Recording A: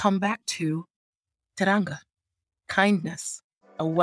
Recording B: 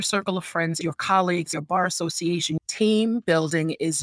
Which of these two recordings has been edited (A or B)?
B